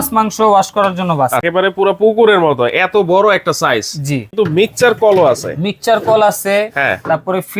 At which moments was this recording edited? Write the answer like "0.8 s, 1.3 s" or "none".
1.5 s, 4.3 s

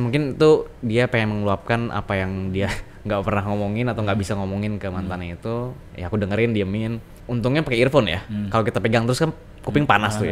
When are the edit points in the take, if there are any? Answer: none

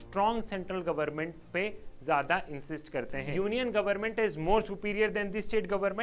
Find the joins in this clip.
3.2 s

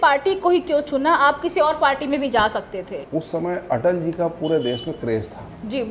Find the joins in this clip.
3.0 s

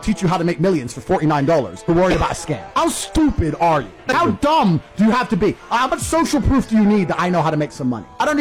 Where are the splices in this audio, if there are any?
none

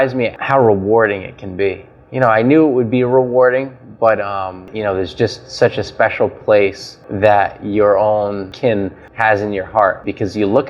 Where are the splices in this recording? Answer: 4.7 s, 9.0 s

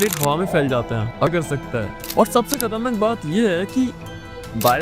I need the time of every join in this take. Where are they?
1.3 s

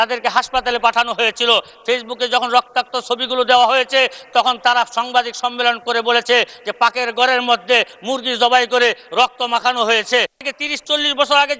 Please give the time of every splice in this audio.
10.3 s

